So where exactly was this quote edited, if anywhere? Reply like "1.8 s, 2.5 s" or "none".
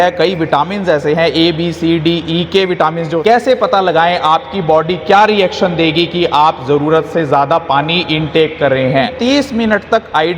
3.1 s, 9.1 s